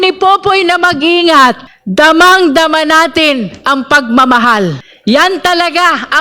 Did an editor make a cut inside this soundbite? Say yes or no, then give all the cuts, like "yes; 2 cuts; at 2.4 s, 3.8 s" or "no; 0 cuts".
yes; 2 cuts; at 1.7 s, 4.9 s